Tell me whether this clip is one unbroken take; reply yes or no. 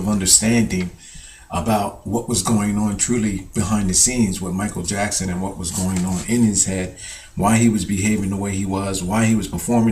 yes